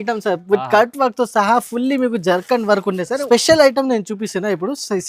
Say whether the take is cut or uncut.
cut